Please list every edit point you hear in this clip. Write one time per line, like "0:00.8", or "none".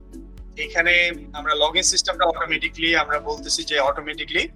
0:01.3

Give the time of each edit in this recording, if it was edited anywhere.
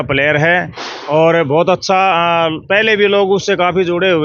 none

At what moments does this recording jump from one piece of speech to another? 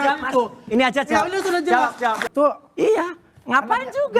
0:02.2

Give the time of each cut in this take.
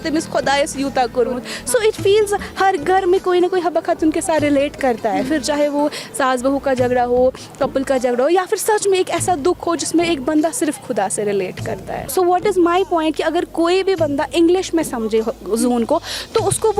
0:12.0

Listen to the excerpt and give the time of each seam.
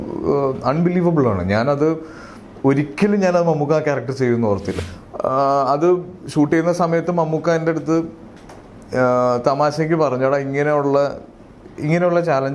0:04.7

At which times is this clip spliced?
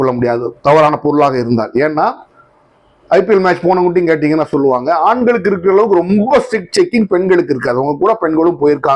none

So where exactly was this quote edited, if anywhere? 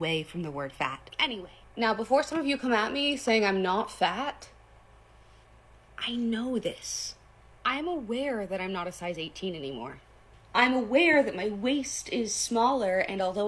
0:01.1
0:10.9

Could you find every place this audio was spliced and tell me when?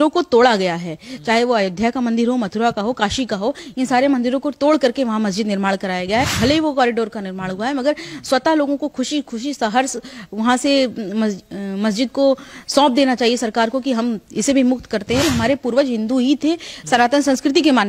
0:06.3
0:15.2

